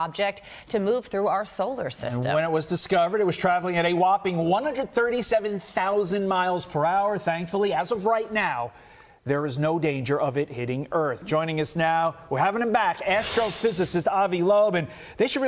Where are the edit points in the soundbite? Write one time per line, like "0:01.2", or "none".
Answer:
0:06.6